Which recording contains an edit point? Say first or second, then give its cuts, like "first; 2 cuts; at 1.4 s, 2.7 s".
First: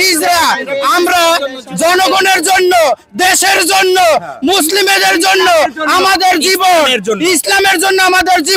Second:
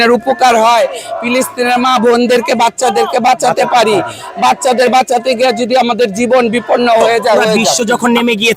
second; 1 cut; at 7.7 s